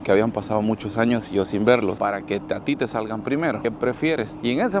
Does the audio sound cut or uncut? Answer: cut